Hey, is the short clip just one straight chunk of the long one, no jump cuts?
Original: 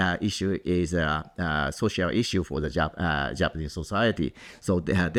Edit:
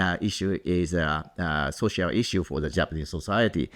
no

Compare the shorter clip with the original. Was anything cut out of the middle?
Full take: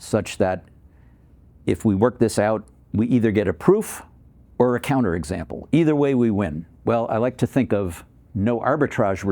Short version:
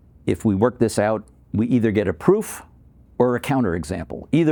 no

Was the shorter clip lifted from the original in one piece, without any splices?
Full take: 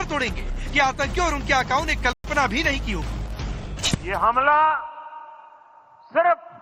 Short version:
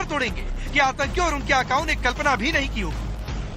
no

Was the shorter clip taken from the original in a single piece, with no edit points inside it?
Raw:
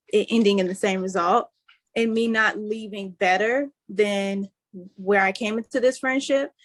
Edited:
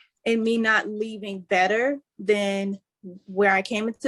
yes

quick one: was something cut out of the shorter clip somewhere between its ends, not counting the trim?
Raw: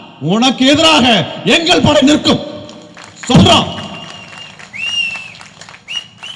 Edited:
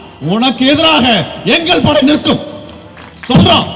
no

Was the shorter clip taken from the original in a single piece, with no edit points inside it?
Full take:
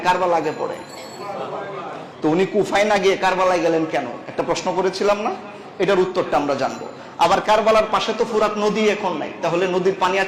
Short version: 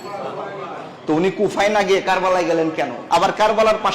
no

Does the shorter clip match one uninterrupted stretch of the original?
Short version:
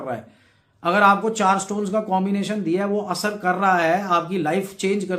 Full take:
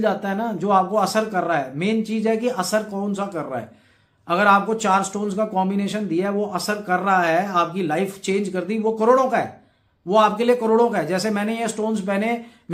yes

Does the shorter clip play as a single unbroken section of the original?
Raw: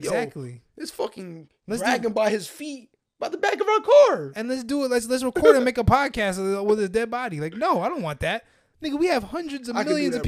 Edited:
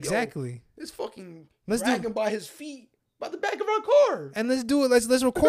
yes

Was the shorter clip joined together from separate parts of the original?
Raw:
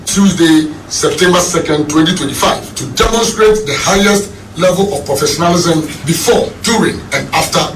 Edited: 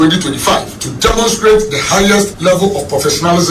yes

